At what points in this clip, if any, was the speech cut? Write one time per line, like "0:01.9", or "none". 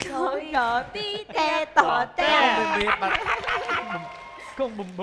none

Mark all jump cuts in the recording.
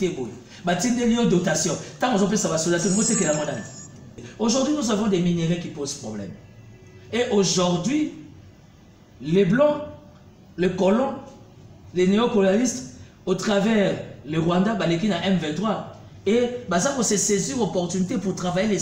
0:04.2

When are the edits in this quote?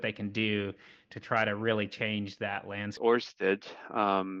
0:03.0

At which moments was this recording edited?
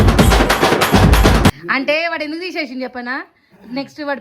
0:01.6

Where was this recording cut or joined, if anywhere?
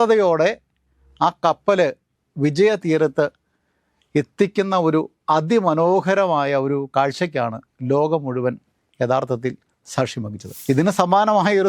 0:02.1
0:10.4

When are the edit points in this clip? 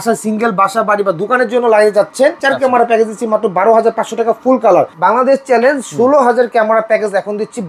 0:02.4
0:04.9

